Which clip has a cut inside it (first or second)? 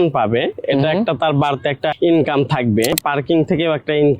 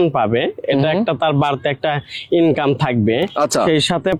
first